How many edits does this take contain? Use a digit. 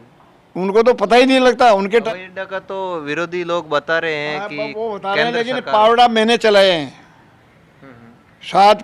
1